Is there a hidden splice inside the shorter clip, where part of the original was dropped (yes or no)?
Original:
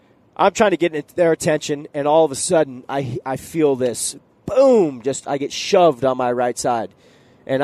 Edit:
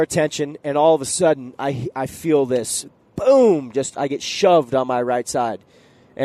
no